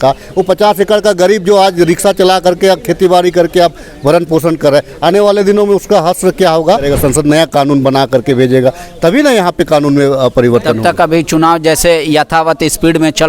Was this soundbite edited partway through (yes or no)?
yes